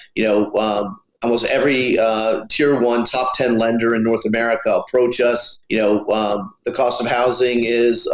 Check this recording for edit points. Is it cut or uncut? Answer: cut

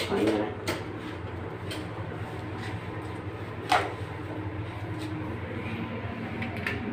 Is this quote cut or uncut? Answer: uncut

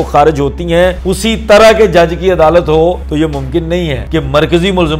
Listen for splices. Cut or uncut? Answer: cut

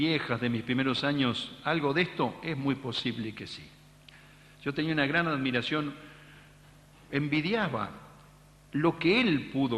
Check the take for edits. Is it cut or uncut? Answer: cut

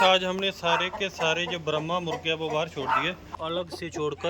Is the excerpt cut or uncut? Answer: cut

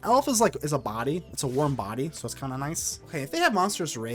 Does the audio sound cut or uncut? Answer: cut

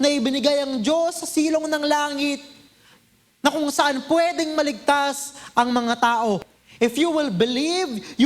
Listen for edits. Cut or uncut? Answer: cut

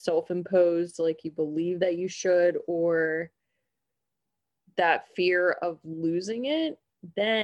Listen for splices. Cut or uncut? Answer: uncut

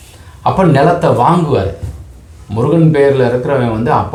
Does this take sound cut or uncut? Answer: uncut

